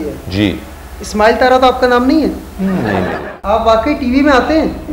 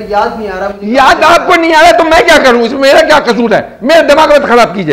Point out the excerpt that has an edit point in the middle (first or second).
first